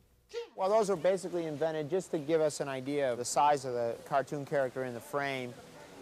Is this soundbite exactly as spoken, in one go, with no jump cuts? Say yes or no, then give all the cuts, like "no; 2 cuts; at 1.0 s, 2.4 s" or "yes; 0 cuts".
yes; 0 cuts